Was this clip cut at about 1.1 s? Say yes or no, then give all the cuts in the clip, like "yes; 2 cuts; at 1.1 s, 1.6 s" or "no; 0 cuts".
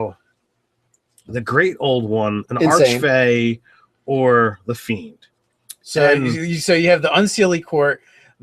no; 1 cut; at 4.5 s